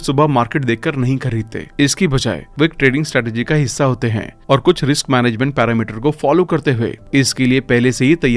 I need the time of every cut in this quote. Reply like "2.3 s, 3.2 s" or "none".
none